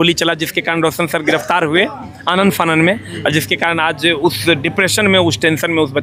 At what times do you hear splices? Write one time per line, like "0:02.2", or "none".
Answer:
none